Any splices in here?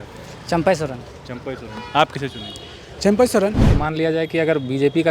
yes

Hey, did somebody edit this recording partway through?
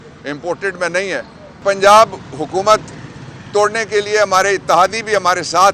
yes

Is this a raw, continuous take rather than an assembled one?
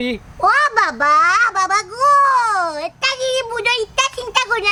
yes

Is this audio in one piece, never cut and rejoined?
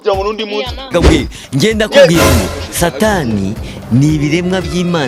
yes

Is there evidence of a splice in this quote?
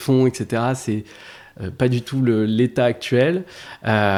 no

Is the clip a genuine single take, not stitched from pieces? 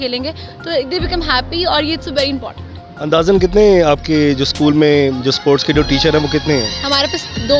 yes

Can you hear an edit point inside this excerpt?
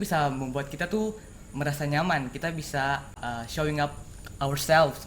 yes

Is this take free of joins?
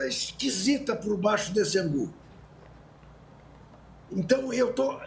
yes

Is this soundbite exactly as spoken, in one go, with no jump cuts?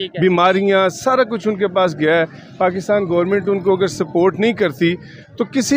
yes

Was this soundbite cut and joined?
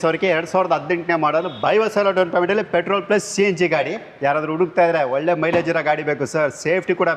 yes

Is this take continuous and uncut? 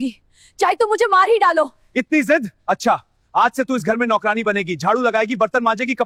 yes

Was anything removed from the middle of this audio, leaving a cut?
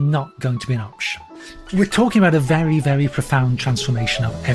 yes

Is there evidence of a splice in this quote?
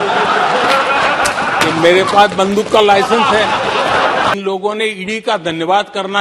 yes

